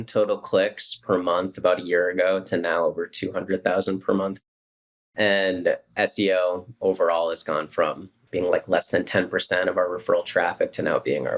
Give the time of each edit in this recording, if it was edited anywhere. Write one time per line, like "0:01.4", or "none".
0:04.4
0:08.2